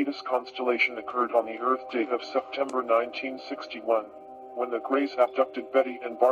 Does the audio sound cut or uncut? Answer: uncut